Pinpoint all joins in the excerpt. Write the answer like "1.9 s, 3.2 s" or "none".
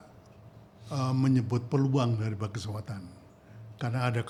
none

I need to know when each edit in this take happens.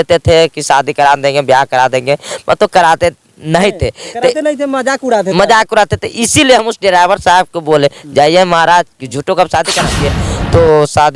10.1 s

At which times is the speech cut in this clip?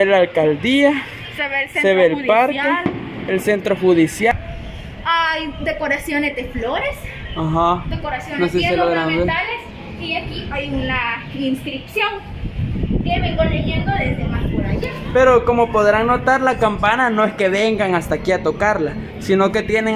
4.3 s

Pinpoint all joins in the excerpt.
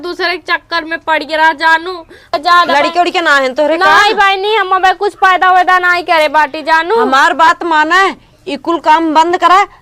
2.3 s

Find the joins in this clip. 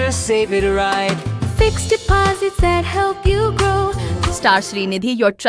4.1 s

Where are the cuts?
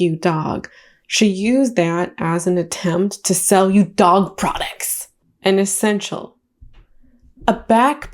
5.2 s

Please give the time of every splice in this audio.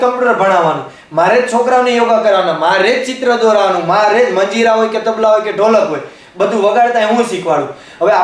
none

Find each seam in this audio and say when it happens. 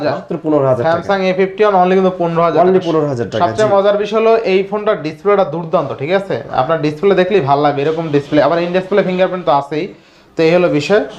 none

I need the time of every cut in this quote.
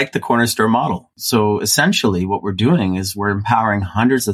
1.1 s

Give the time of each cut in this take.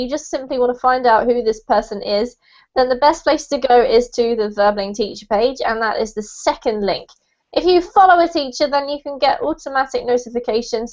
5.7 s

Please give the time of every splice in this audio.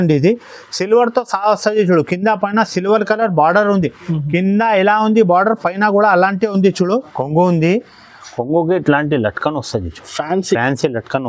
7.1 s

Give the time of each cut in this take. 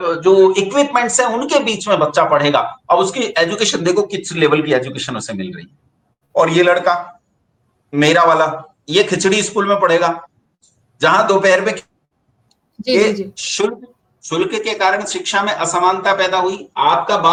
none

